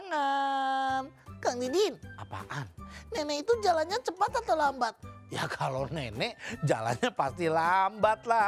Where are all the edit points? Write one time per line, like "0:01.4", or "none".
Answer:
0:01.2